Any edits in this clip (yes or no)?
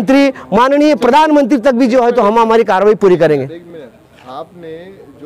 no